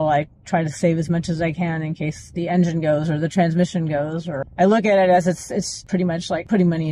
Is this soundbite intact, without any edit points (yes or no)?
no